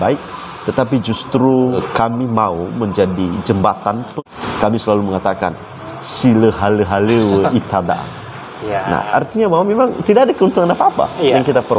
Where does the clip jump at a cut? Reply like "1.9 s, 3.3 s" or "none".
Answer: 1.8 s, 4.1 s